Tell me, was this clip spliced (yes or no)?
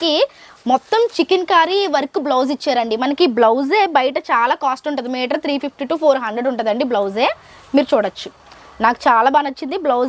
no